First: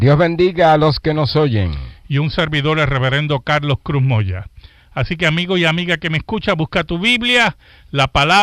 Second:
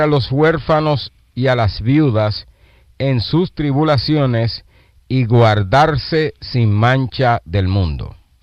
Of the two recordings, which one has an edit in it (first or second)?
second